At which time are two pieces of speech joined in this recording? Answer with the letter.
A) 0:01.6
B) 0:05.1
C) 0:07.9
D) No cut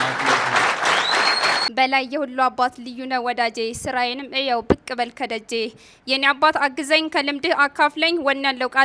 A